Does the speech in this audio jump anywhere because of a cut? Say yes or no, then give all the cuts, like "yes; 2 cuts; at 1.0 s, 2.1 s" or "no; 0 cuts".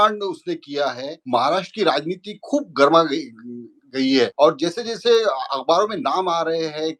yes; 2 cuts; at 1.1 s, 4.3 s